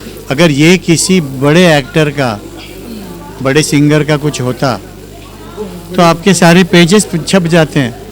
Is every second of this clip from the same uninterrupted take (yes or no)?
yes